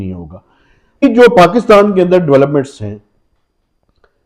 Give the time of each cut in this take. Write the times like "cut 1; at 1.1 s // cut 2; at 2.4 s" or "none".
cut 1; at 1.0 s